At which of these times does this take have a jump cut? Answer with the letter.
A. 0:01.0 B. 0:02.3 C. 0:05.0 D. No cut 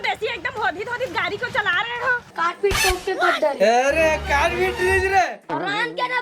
B